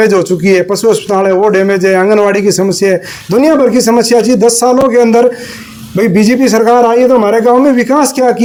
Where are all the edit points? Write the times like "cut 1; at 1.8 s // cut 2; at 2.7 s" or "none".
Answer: none